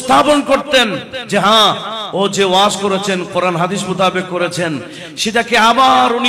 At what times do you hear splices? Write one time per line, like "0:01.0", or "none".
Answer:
none

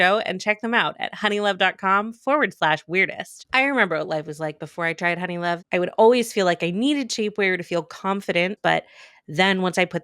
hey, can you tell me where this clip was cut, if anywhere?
0:05.6
0:08.6

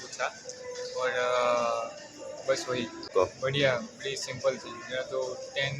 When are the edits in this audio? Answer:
0:03.1

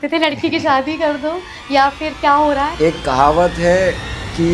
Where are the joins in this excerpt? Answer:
0:02.7

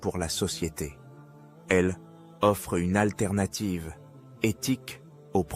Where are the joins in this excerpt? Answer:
none

